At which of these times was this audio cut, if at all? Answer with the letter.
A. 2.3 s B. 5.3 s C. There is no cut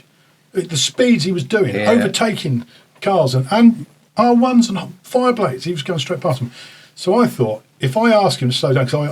C